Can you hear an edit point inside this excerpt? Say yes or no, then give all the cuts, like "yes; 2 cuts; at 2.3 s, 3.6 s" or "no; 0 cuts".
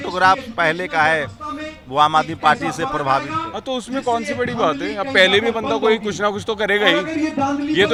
no; 0 cuts